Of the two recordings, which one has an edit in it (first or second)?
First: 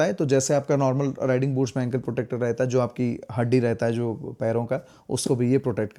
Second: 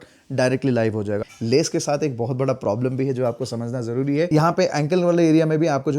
second